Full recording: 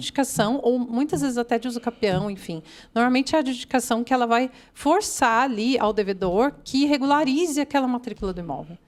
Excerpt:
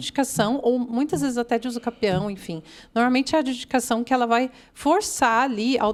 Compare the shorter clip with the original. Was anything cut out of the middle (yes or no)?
no